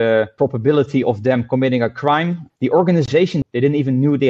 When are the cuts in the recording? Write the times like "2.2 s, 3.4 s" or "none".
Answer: 2.4 s, 3.4 s